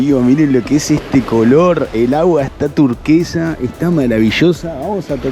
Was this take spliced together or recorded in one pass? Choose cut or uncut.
uncut